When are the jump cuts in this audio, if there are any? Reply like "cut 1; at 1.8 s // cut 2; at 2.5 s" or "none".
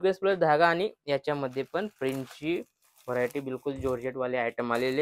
none